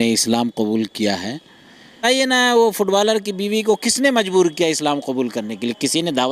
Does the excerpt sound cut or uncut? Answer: cut